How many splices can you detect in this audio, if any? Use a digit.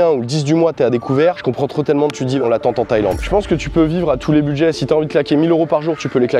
2